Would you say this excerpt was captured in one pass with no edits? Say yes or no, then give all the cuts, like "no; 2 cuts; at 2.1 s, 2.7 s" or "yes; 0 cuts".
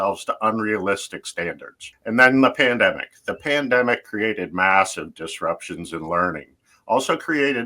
no; 1 cut; at 1.9 s